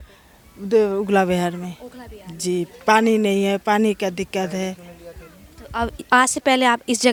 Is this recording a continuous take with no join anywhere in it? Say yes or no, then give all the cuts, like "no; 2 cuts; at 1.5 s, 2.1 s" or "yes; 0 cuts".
yes; 0 cuts